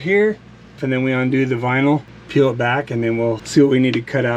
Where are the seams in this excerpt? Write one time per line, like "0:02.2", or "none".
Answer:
0:00.8
0:02.2
0:03.4